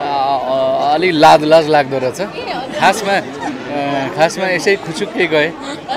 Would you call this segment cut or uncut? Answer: uncut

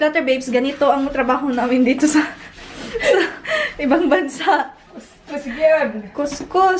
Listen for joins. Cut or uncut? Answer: uncut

